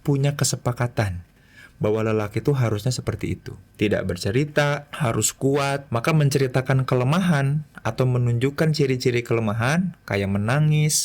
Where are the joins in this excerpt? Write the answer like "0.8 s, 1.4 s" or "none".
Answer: 3.6 s, 4.9 s, 5.8 s